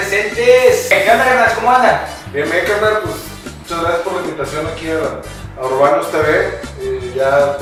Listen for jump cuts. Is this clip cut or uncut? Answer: uncut